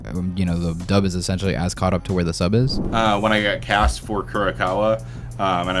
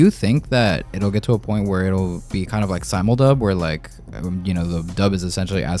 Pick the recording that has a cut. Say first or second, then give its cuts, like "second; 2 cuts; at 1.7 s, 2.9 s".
first; 1 cut; at 2.8 s